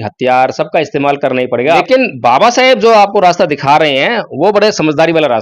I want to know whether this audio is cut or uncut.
cut